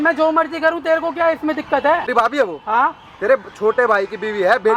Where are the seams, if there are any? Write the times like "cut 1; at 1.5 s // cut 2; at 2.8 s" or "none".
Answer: cut 1; at 2.1 s